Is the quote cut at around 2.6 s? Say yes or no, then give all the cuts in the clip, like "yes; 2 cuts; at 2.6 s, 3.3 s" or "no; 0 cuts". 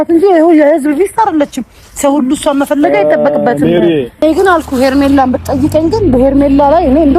no; 1 cut; at 4.2 s